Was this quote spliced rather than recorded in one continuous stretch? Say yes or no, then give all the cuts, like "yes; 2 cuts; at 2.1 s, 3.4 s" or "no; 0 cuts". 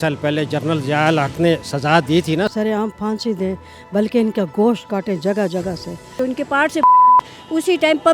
yes; 2 cuts; at 2.5 s, 6.2 s